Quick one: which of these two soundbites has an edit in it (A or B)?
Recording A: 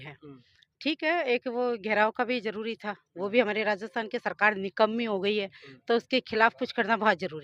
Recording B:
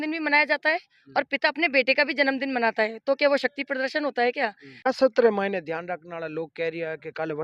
B